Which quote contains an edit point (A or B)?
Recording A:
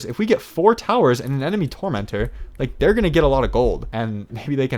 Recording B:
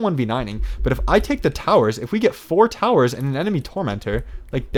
A